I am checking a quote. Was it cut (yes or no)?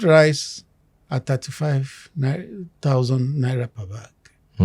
no